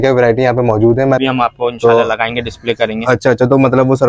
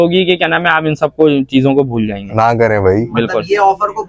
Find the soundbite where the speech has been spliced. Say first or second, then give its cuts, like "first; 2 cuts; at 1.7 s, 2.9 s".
first; 1 cut; at 1.2 s